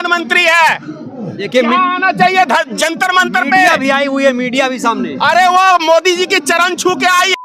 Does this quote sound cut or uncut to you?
uncut